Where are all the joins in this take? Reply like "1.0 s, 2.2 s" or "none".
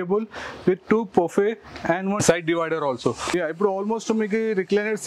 2.2 s, 3.3 s